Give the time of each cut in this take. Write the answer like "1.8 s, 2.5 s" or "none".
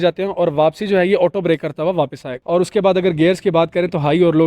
2.4 s